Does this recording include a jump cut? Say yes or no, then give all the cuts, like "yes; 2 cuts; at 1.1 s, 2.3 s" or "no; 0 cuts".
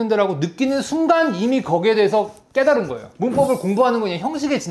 no; 0 cuts